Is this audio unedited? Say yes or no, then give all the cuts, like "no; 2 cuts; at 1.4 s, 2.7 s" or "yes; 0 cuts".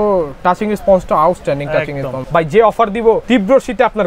no; 2 cuts; at 2.2 s, 3.2 s